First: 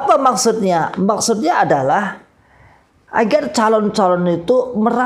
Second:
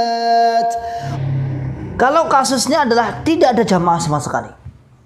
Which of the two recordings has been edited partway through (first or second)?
second